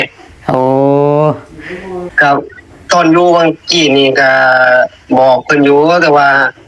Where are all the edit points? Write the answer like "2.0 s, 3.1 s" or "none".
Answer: 2.1 s